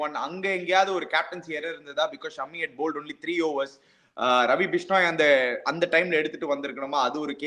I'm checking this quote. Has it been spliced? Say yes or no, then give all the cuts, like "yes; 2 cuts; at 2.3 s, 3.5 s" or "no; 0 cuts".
no; 0 cuts